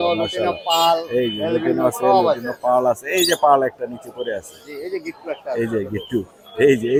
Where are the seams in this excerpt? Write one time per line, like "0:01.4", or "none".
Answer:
none